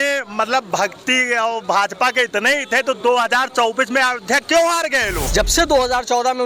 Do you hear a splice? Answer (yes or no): yes